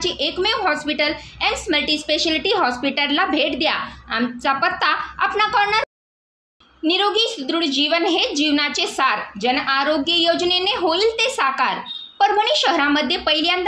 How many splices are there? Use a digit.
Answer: 1